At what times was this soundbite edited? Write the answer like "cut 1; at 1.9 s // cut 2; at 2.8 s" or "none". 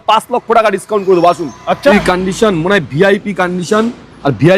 cut 1; at 1.9 s